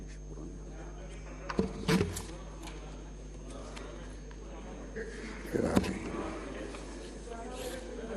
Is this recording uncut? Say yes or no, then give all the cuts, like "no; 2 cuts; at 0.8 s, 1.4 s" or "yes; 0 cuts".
yes; 0 cuts